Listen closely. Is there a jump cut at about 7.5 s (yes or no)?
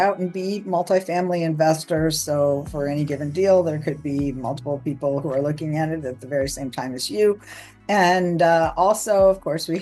no